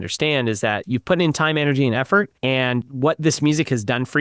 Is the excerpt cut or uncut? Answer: cut